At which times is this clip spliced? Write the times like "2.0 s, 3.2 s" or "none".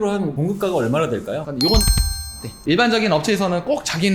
1.9 s